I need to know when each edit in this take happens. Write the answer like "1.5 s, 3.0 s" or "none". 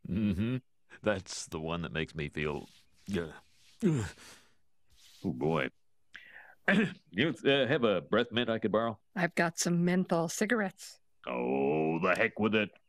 none